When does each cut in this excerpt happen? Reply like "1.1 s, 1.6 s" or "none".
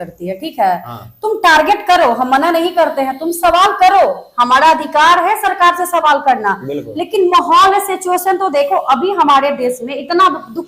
none